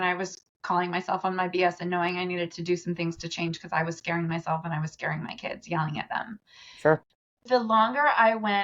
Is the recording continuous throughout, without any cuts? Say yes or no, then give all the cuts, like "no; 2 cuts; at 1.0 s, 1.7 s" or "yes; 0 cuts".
no; 1 cut; at 7.4 s